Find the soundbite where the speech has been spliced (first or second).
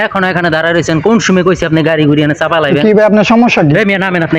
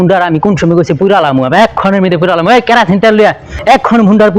second